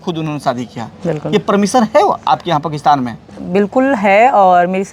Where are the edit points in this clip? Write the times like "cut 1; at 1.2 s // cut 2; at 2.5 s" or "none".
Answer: none

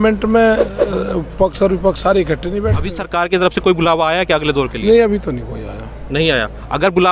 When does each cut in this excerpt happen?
cut 1; at 2.9 s

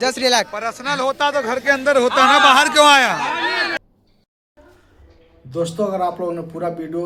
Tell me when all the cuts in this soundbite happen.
none

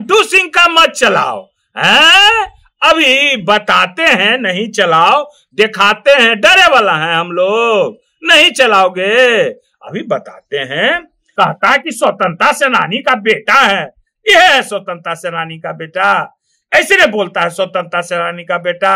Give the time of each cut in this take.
cut 1; at 11.2 s

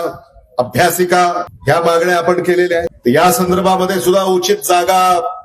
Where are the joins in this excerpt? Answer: cut 1; at 1.5 s // cut 2; at 2.9 s

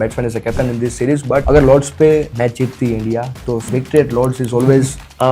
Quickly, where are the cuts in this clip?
cut 1; at 1.4 s // cut 2; at 2.3 s // cut 3; at 3.7 s

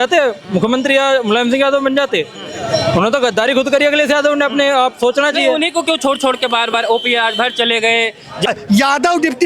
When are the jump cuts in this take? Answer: cut 1; at 8.5 s

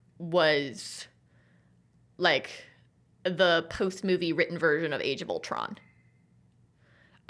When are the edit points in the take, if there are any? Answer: none

